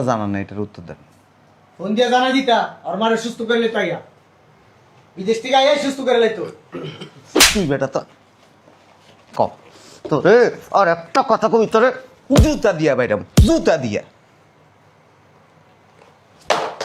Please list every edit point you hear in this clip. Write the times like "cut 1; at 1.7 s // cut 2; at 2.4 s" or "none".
none